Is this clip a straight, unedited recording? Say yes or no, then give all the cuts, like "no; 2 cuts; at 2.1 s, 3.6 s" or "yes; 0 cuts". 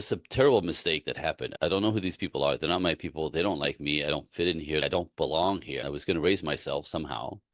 no; 1 cut; at 5.8 s